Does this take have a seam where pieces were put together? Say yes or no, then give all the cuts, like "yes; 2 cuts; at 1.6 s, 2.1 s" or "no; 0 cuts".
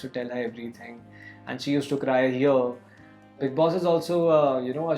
yes; 1 cut; at 3.4 s